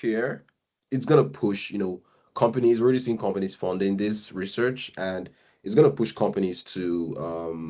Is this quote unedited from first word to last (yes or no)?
yes